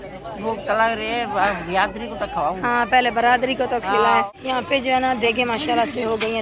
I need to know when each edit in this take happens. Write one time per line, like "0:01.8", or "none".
0:04.3

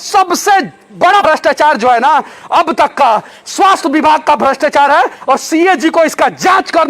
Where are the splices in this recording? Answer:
0:01.2

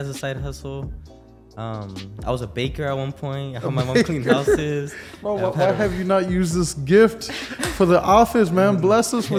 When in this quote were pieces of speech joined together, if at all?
none

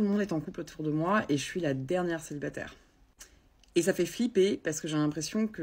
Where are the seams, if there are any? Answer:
0:01.2

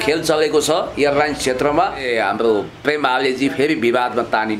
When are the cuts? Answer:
0:02.0

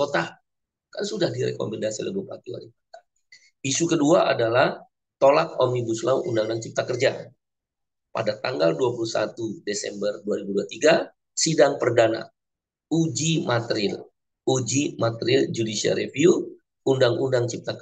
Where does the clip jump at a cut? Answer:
none

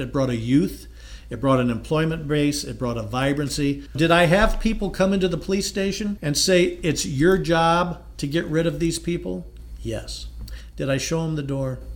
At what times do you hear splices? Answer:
0:03.9
0:06.2

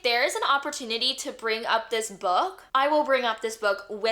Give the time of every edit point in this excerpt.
none

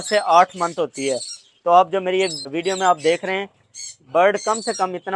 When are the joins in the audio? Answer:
0:02.5

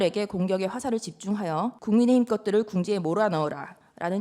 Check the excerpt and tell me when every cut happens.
0:01.8

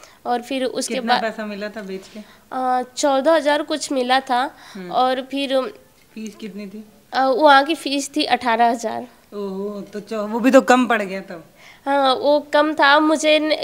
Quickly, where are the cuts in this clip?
none

